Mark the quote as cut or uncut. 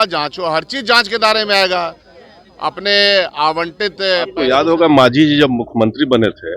cut